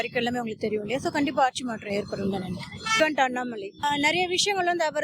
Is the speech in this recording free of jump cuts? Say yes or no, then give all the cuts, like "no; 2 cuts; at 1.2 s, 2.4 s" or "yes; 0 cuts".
no; 2 cuts; at 2.8 s, 3.8 s